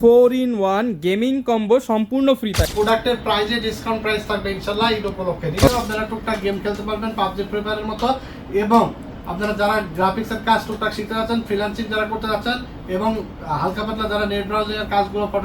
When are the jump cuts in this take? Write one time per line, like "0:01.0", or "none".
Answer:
0:02.6
0:05.7